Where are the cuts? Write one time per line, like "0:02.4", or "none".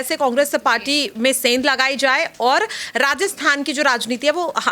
none